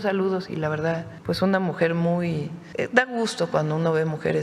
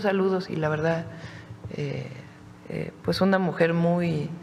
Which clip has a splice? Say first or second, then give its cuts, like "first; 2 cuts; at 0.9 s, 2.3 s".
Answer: first; 2 cuts; at 1.1 s, 2.6 s